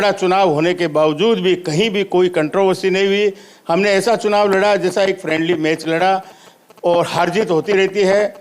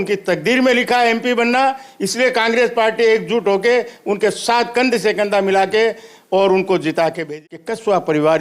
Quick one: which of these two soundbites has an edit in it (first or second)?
second